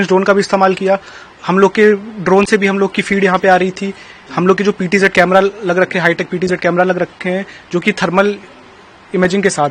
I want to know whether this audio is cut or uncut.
uncut